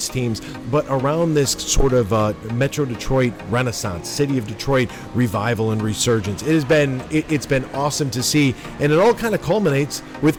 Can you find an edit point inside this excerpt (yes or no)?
no